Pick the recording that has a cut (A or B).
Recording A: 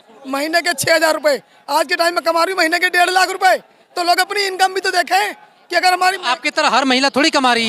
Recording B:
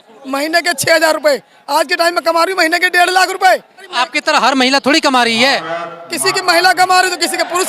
B